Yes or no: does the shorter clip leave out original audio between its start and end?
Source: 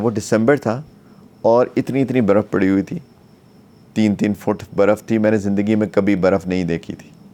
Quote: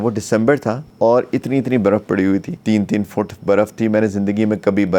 yes